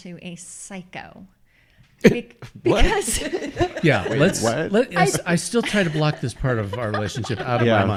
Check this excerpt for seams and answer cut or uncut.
uncut